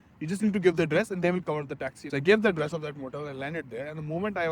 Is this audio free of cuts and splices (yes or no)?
no